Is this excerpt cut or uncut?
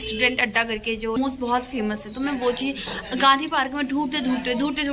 cut